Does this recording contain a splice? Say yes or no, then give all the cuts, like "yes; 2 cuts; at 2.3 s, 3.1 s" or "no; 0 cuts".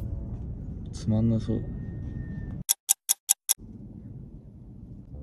yes; 1 cut; at 2.6 s